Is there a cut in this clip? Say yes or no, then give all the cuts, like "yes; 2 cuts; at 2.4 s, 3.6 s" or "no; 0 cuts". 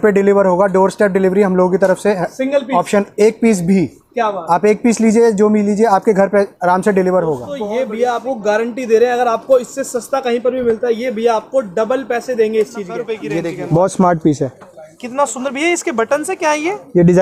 yes; 2 cuts; at 7.6 s, 13.2 s